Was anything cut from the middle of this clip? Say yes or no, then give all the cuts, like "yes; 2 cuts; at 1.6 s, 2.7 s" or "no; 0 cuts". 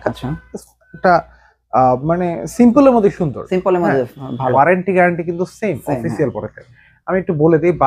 yes; 1 cut; at 4.5 s